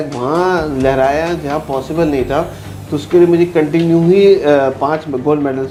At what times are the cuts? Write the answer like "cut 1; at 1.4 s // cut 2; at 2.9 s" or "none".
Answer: none